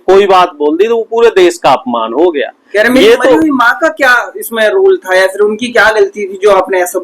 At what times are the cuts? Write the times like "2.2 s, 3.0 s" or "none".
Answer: none